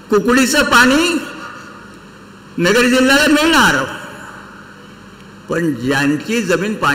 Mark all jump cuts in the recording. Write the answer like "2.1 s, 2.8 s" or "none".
none